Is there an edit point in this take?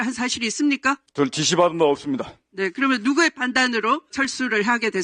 yes; 2 cuts; at 1.1 s, 4.1 s

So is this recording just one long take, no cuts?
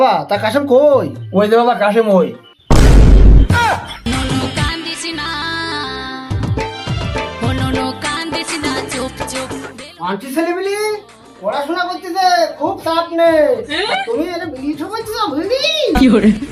yes; 0 cuts

